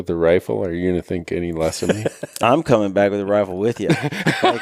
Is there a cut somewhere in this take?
no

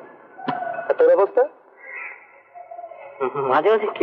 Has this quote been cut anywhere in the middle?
no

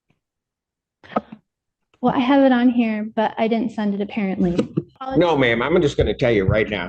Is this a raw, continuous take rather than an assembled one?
no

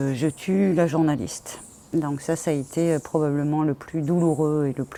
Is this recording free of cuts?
yes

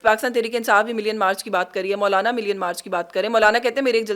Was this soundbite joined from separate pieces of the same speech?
no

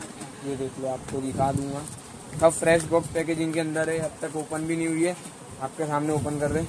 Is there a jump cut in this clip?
no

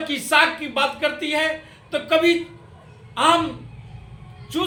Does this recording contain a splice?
no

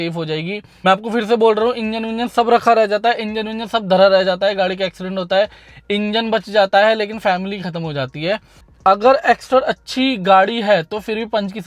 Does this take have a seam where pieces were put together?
yes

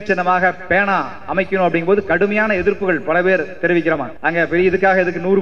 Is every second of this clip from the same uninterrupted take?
no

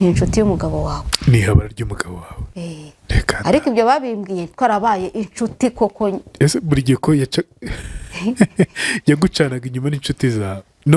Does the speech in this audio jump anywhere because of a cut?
no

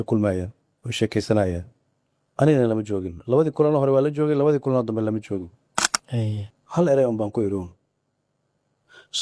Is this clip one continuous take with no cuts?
no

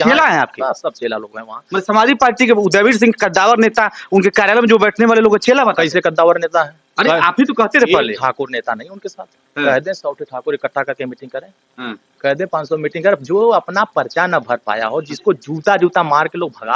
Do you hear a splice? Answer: no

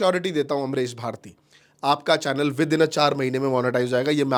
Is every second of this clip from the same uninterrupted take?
yes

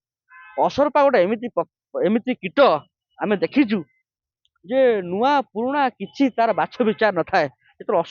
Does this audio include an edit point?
no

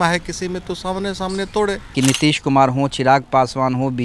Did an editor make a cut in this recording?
yes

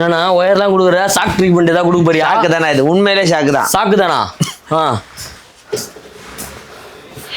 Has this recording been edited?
no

